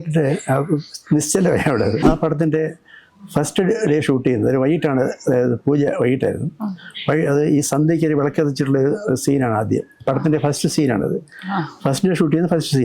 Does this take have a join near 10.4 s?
no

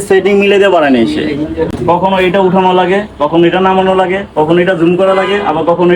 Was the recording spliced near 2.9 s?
no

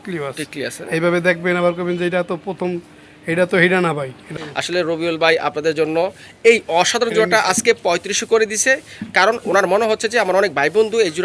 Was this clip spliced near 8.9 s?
no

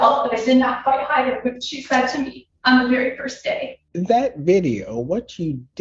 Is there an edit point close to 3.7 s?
yes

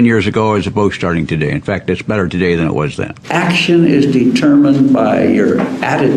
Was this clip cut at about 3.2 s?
yes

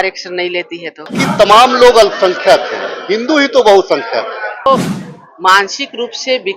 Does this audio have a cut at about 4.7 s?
yes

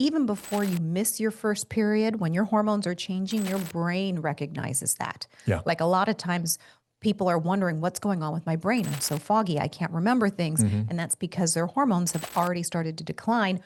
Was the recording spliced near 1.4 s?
no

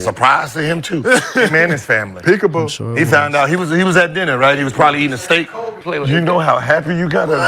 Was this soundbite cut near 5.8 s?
yes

